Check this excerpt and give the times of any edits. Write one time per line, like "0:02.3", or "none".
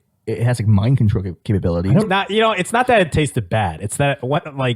0:02.0